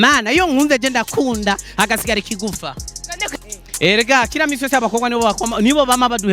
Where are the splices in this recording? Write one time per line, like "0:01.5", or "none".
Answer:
0:03.3

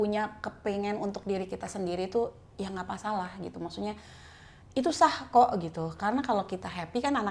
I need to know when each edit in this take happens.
none

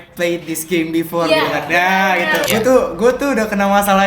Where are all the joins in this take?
0:02.4

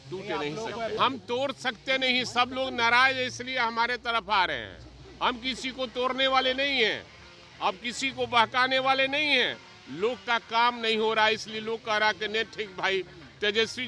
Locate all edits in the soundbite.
0:01.0

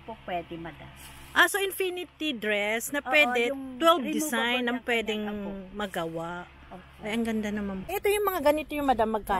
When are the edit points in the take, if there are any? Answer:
0:07.8

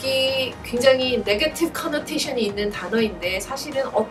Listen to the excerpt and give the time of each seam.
none

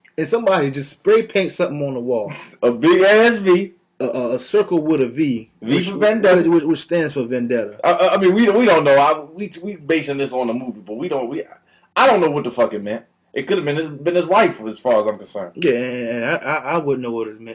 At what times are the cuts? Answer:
none

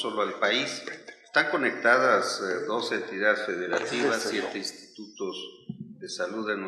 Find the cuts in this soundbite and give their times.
0:05.2

